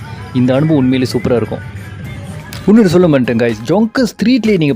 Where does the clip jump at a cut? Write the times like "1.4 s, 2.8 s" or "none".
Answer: none